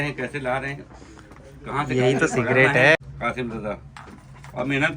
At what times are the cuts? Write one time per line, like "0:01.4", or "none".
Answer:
0:03.0